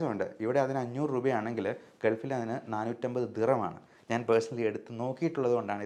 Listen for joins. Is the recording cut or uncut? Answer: uncut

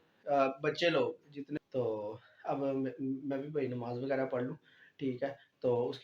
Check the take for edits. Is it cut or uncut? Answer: cut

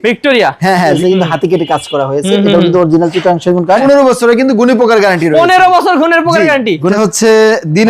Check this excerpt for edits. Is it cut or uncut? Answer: cut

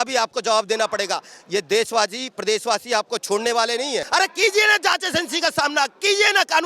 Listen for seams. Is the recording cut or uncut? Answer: cut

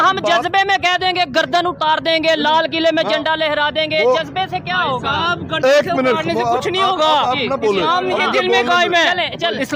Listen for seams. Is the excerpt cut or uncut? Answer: uncut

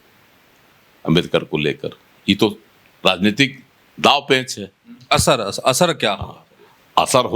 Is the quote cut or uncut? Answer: uncut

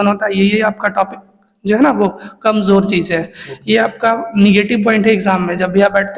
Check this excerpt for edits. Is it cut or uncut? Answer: uncut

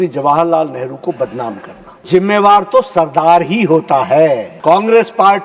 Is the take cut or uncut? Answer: cut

